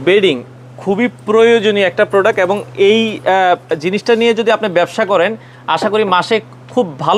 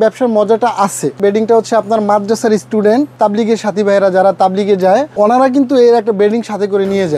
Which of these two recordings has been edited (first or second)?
second